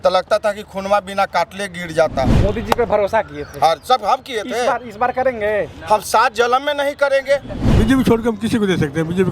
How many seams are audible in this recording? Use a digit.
2